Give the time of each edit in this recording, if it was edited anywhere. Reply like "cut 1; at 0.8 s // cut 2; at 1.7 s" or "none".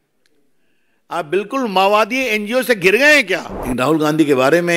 cut 1; at 3.5 s

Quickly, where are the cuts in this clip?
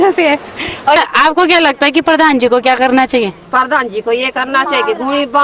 cut 1; at 1.0 s

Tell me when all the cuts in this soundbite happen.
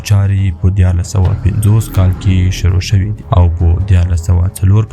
cut 1; at 3.2 s

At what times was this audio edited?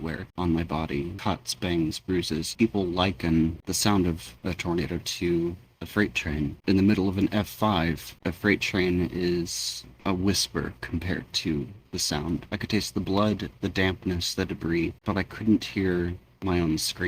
cut 1; at 1.1 s // cut 2; at 2.5 s // cut 3; at 6.6 s // cut 4; at 12.5 s

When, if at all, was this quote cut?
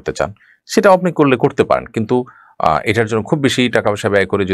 none

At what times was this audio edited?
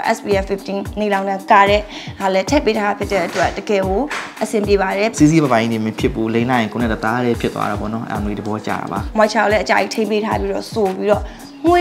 cut 1; at 5.1 s // cut 2; at 9.0 s

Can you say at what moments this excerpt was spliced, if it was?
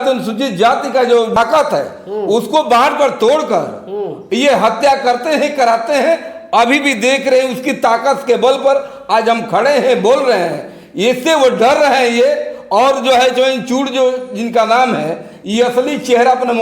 cut 1; at 1.4 s

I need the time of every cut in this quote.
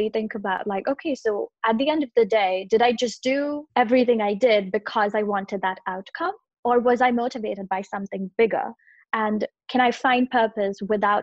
cut 1; at 3.6 s

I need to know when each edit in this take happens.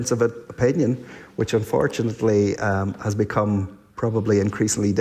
none

